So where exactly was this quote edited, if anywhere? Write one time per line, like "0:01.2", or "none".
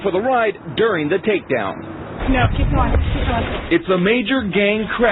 none